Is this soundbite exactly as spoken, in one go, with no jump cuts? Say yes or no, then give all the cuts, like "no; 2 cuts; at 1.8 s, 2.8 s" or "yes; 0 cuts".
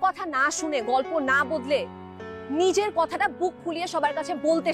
yes; 0 cuts